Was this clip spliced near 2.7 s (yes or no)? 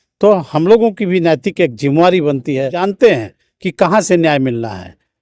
yes